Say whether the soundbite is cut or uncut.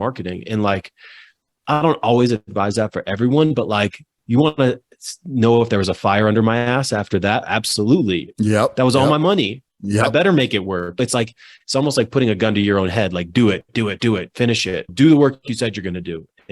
cut